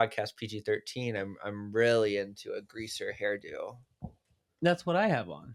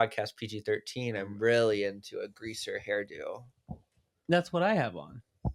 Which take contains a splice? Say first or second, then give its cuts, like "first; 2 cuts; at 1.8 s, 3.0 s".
second; 1 cut; at 1.3 s